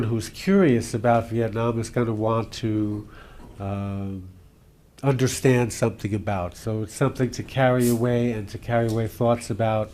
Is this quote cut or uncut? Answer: uncut